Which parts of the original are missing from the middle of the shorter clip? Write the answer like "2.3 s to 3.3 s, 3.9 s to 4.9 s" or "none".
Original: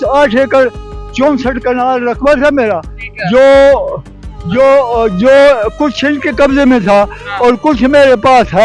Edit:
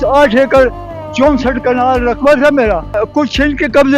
3.0 s to 5.7 s